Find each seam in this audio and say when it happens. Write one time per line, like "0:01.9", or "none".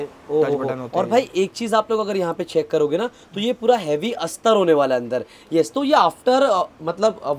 none